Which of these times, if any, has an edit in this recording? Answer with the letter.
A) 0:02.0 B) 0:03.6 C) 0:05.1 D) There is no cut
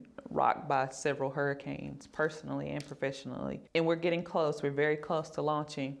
B